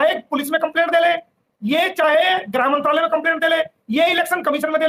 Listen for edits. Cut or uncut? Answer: uncut